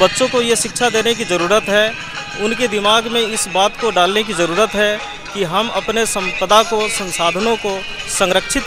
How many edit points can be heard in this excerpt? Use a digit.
0